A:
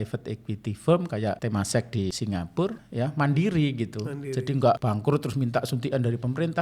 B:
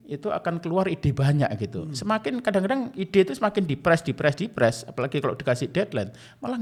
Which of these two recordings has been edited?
A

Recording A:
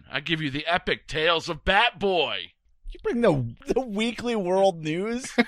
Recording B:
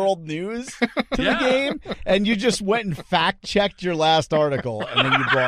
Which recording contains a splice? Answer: A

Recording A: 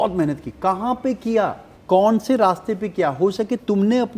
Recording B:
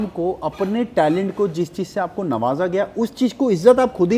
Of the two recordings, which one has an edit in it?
A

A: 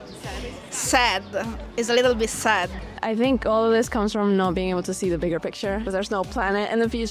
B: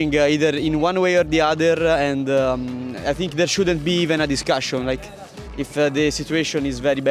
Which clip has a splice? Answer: A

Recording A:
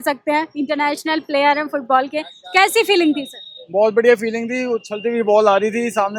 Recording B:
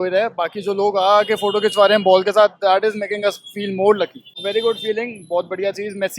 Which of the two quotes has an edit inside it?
B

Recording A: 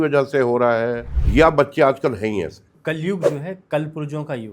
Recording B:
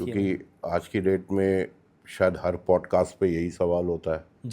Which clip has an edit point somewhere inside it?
A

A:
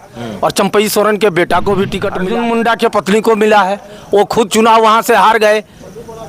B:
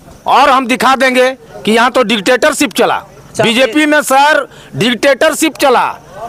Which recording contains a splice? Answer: A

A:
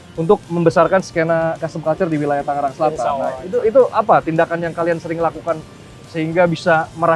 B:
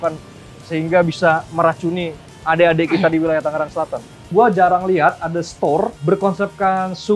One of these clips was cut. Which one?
B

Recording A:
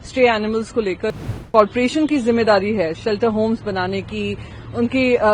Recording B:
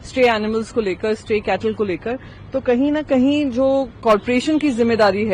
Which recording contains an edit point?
A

